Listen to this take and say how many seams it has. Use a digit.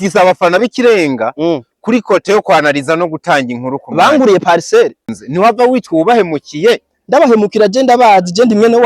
1